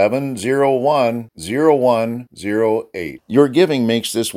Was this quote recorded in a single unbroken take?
yes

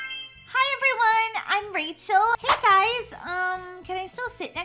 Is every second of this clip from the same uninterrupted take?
no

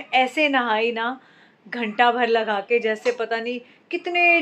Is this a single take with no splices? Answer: yes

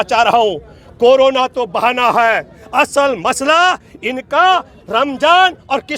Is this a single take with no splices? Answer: yes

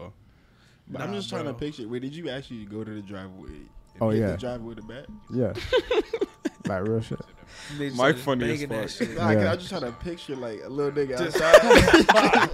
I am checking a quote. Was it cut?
no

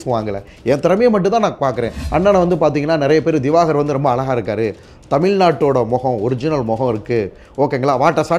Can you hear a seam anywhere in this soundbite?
yes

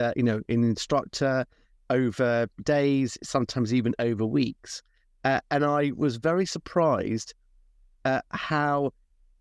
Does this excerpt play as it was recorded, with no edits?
no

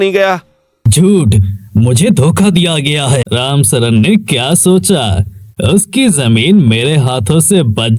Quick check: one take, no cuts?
no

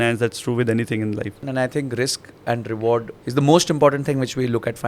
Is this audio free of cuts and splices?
no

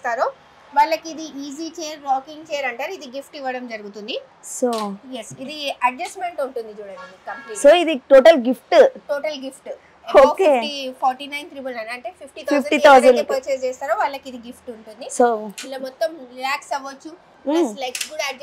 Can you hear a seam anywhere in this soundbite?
no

